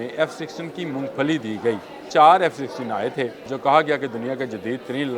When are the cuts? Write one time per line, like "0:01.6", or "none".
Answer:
0:02.0
0:03.5

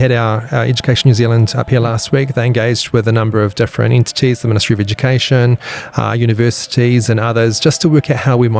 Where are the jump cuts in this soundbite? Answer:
none

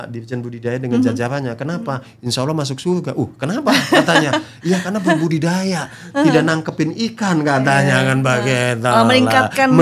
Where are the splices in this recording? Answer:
none

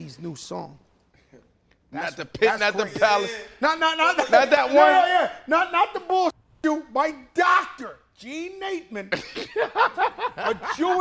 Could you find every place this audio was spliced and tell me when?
none

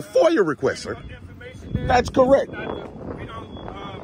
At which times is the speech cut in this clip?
none

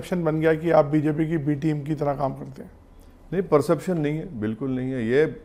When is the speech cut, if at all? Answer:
none

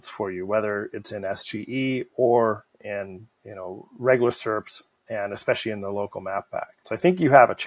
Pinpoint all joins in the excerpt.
0:06.8

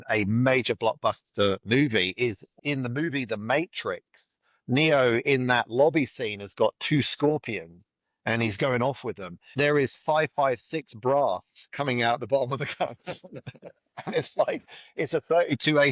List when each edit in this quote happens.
0:02.5
0:09.5

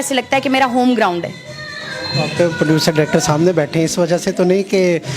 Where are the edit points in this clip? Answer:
none

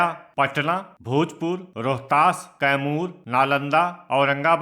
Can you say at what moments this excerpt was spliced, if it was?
0:00.9
0:01.7
0:03.2

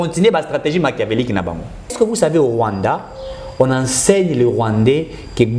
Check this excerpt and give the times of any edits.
0:01.9

